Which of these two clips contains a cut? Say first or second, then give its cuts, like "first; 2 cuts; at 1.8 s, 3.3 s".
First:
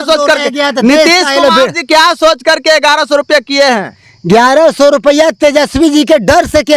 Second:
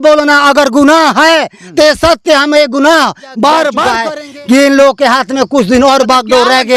second; 1 cut; at 4.0 s